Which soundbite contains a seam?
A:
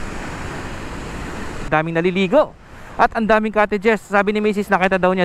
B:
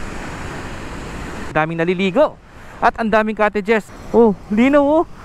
B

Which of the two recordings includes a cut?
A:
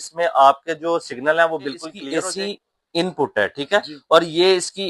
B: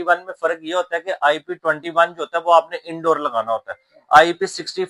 A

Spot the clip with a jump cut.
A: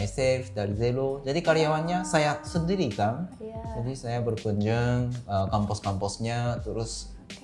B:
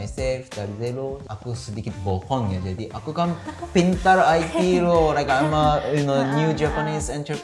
B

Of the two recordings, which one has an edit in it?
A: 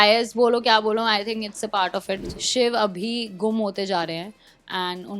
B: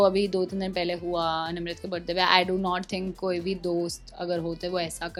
A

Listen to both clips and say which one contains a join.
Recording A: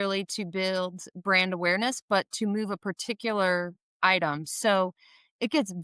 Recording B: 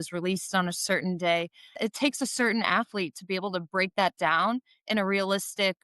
B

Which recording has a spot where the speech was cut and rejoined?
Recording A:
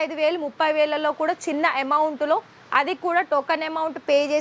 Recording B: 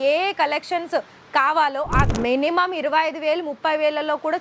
B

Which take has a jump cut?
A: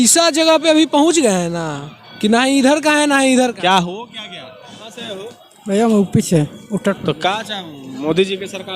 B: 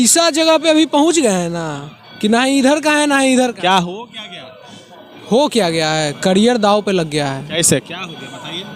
A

